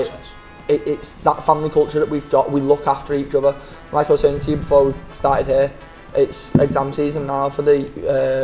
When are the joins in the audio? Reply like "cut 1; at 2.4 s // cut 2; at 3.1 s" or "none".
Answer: none